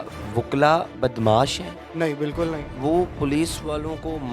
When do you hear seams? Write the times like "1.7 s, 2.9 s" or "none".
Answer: 1.8 s, 2.7 s